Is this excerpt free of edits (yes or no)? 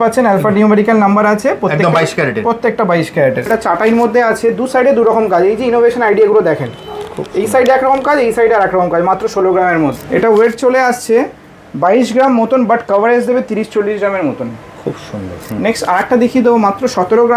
no